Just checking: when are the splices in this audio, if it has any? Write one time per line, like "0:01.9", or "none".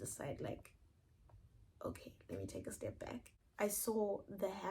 0:03.4

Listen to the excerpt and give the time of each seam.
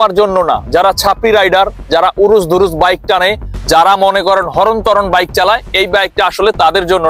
none

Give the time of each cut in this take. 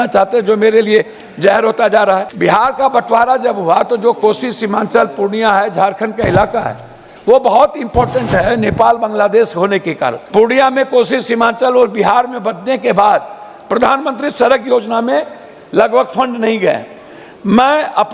0:02.3
0:10.2

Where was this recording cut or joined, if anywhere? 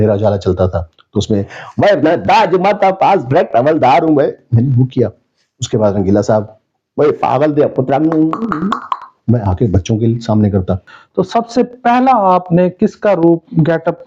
0:10.9

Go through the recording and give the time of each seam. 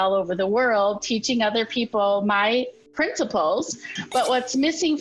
0:03.9

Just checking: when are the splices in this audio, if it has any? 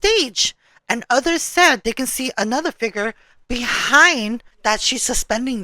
0:04.5

